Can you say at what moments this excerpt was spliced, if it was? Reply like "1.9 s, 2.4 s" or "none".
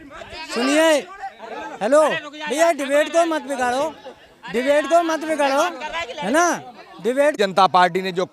none